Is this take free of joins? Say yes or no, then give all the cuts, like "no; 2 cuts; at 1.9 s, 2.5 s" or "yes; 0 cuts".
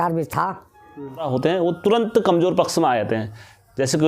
no; 1 cut; at 1.3 s